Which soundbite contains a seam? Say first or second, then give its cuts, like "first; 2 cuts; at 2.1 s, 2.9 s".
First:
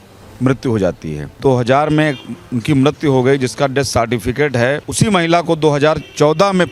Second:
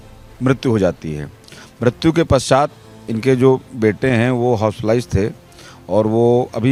first; 2 cuts; at 1.3 s, 4.9 s